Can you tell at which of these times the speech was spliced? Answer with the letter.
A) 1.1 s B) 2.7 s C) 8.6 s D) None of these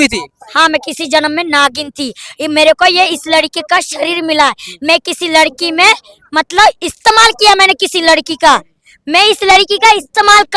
D